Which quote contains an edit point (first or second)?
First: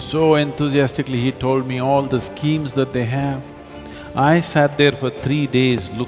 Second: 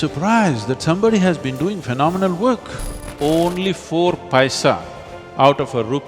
second